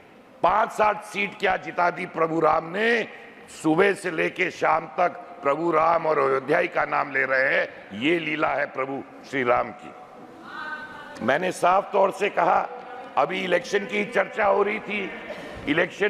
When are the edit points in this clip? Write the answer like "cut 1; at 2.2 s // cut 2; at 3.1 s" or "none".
none